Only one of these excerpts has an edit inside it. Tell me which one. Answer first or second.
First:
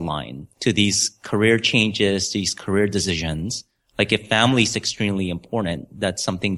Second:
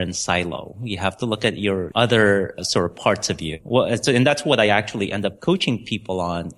second